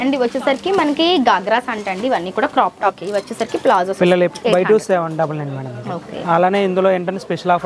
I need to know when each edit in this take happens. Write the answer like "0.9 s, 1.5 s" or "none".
3.0 s, 4.3 s